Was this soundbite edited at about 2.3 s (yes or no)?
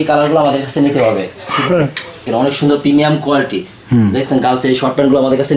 yes